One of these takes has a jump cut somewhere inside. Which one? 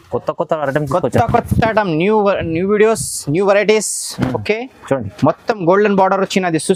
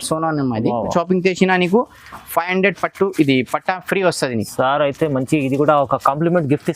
second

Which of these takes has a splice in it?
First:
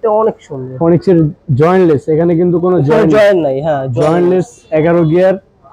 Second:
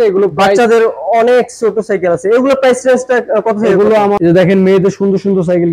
second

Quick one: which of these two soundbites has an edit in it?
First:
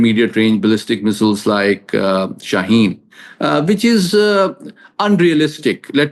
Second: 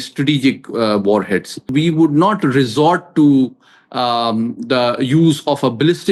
second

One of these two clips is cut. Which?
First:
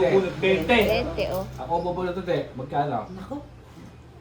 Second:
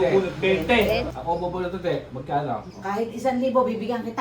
second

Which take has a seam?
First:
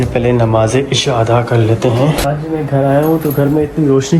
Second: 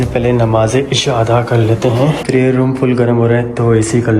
first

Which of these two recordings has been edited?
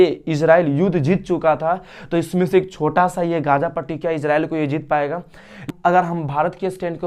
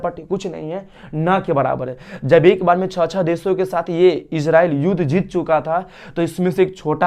first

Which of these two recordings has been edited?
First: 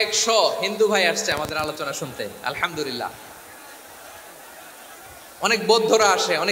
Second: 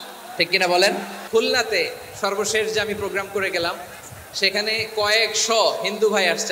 second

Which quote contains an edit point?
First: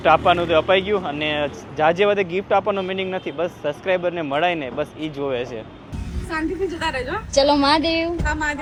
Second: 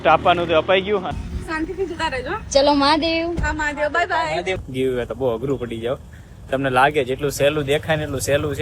second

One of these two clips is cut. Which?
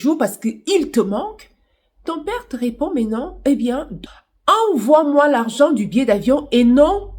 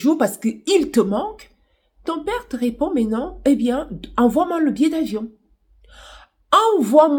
first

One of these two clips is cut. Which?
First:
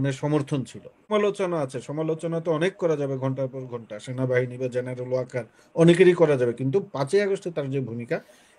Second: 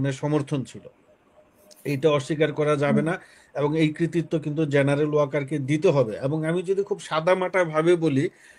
first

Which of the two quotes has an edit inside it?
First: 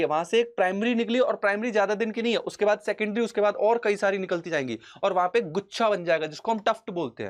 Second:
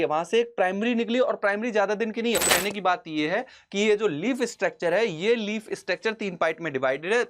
second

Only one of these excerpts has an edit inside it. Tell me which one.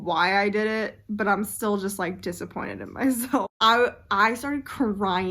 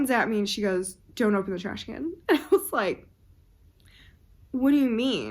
first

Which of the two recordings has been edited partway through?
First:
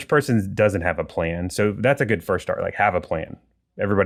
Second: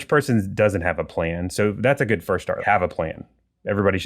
second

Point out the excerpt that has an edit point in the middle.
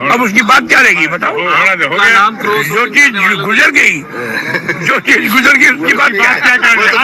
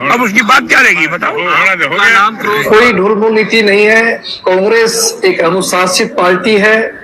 second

